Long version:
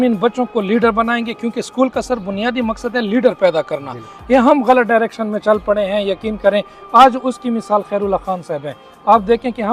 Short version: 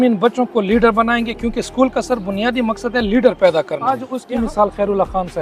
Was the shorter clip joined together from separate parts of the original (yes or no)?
yes